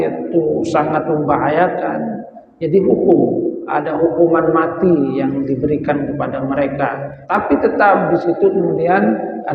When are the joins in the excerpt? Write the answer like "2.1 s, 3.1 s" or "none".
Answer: 7.1 s